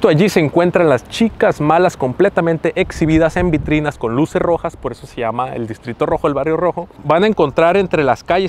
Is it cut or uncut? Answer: uncut